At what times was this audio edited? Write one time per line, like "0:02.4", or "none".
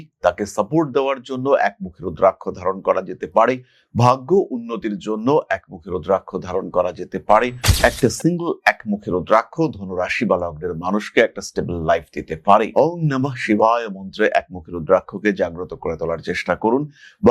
0:07.6